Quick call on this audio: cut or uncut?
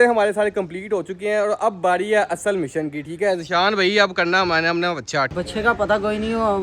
cut